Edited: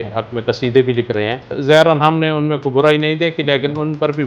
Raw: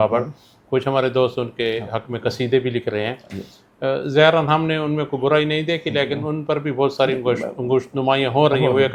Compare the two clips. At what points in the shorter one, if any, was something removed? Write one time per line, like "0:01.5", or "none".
0:01.5

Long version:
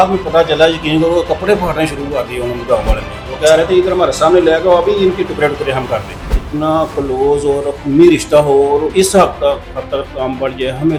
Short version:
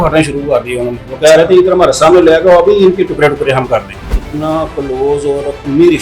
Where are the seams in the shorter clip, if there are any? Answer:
0:00.9

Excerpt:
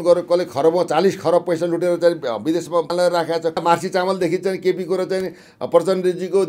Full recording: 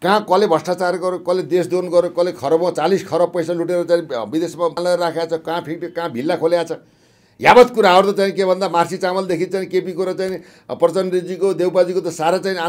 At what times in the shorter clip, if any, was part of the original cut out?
0:03.6

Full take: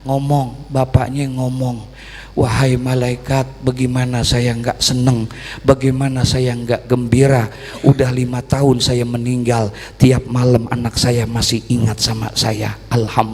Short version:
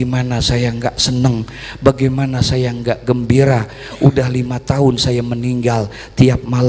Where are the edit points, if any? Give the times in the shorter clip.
none

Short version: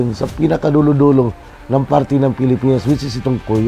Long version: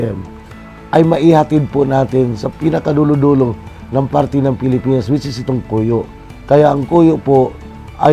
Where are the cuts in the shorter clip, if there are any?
none

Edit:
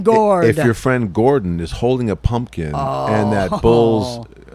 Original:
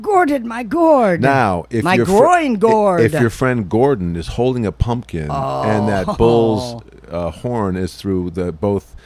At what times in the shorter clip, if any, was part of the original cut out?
none

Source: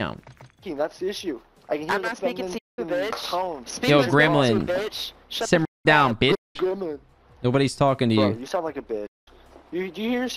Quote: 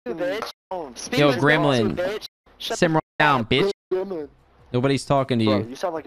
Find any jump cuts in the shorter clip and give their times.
none

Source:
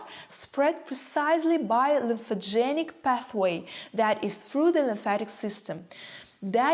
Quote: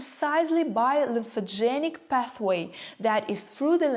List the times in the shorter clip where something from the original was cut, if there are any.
none

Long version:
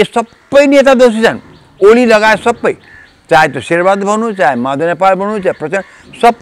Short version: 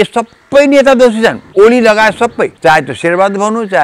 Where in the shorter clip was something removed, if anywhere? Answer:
0:01.4
0:02.5

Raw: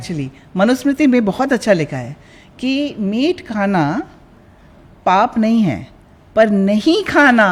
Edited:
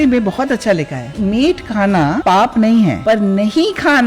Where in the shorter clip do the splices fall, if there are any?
0:01.1
0:02.2
0:03.0

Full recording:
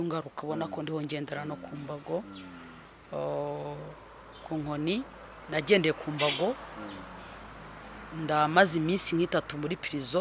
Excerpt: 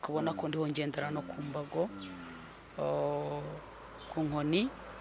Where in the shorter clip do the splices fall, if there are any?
none

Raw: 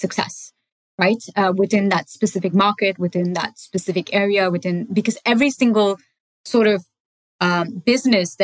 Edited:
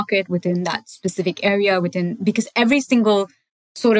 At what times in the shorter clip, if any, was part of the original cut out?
none

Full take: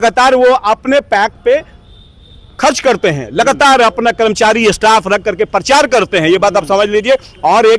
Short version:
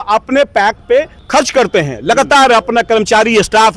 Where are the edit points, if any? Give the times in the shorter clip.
0:01.2

